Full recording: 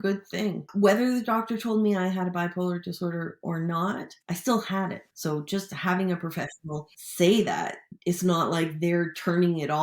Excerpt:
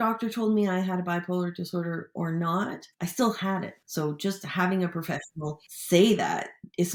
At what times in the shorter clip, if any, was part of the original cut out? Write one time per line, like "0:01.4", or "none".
none

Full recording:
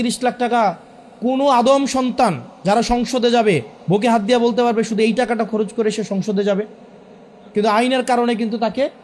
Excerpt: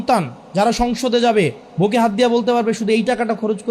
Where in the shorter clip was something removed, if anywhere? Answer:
none

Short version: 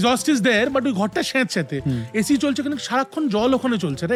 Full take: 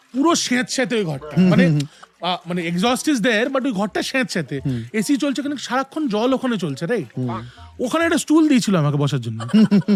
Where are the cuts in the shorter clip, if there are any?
none

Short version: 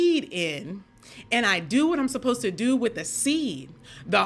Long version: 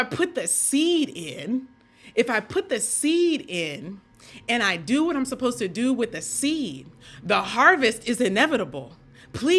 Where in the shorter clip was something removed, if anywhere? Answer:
none

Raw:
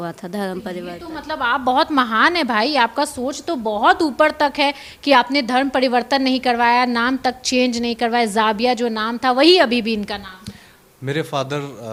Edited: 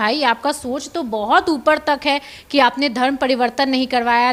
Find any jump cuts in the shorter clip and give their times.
none

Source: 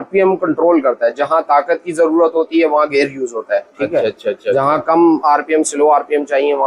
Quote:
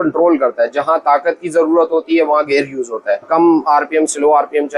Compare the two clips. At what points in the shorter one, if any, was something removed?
0:03.2

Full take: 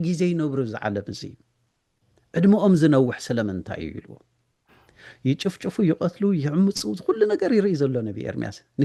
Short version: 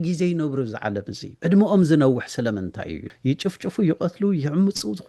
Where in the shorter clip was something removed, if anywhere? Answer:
0:01.2
0:03.0

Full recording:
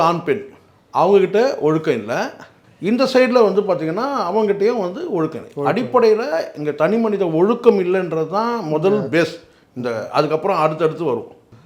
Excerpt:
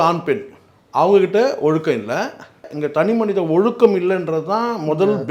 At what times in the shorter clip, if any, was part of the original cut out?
0:02.7

